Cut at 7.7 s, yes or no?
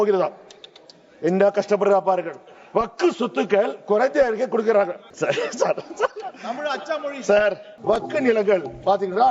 yes